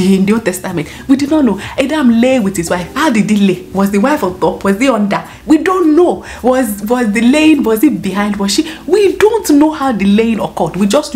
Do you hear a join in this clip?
no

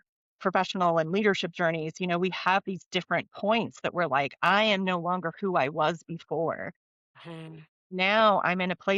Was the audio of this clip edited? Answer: no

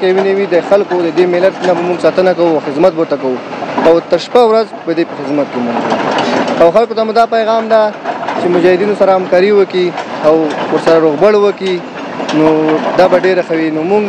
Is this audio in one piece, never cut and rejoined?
yes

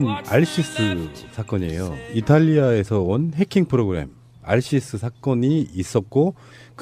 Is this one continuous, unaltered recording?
yes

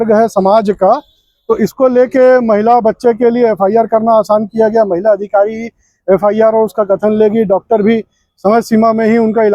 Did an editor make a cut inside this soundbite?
no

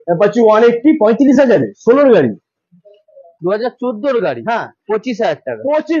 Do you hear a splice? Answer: yes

